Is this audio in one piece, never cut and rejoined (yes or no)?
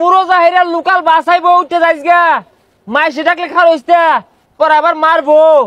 yes